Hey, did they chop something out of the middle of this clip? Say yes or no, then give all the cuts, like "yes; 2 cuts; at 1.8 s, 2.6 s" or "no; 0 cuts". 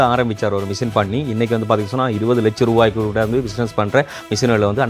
no; 0 cuts